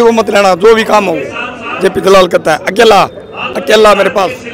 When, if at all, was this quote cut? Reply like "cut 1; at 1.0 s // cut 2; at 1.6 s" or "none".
none